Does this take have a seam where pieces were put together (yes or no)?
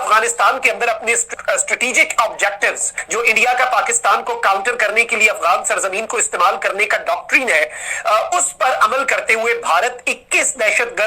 yes